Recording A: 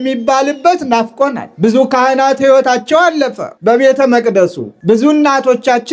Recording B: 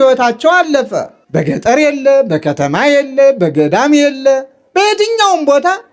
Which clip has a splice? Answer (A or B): A